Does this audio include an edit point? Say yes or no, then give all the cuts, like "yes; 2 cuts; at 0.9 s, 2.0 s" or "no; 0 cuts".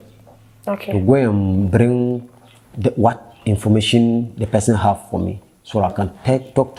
no; 0 cuts